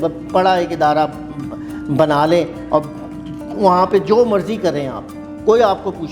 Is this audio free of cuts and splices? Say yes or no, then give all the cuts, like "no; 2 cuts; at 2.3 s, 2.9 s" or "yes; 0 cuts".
yes; 0 cuts